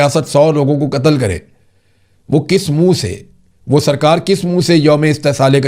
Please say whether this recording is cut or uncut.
uncut